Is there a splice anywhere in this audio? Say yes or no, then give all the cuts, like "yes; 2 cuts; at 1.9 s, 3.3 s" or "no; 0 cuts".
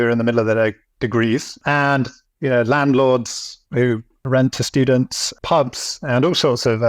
yes; 2 cuts; at 1.5 s, 4.3 s